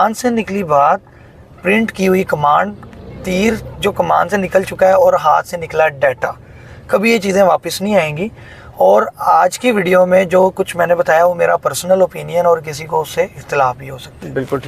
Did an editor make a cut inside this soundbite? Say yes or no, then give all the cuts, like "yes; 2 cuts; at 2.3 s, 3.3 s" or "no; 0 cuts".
no; 0 cuts